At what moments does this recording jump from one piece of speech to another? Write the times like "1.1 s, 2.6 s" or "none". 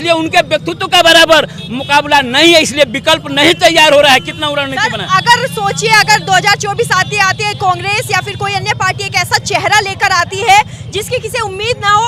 none